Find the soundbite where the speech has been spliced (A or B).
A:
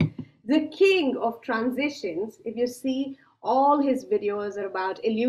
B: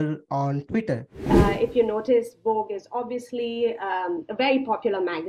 B